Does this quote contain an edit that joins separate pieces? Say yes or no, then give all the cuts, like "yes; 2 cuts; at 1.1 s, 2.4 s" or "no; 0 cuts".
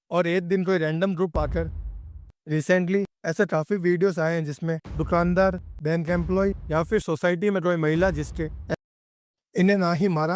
yes; 2 cuts; at 1.9 s, 8.9 s